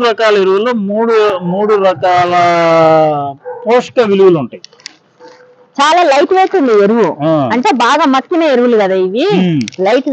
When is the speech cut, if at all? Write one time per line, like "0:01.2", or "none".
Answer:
0:04.6